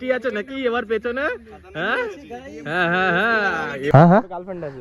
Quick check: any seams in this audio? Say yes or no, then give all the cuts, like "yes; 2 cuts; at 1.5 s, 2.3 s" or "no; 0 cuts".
yes; 1 cut; at 3.9 s